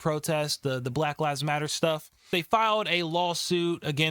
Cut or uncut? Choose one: cut